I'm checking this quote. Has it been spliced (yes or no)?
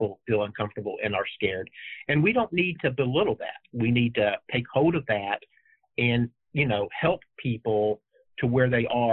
no